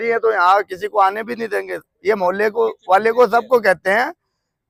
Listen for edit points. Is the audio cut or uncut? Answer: uncut